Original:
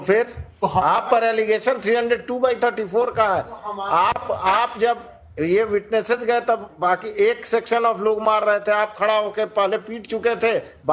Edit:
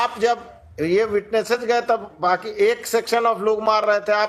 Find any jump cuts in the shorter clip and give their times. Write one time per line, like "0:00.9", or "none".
none